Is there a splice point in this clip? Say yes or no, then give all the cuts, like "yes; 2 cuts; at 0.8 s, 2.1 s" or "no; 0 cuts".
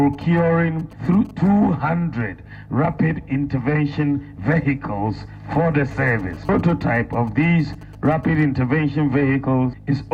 no; 0 cuts